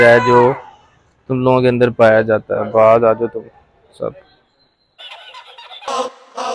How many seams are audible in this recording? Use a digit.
0